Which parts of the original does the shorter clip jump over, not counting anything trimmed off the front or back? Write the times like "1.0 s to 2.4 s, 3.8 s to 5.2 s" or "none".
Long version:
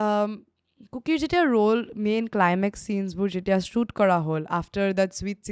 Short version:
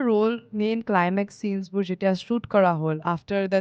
none